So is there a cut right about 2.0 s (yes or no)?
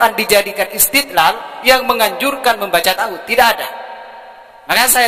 no